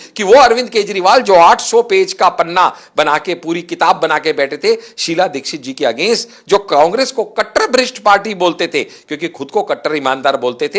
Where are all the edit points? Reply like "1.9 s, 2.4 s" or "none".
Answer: none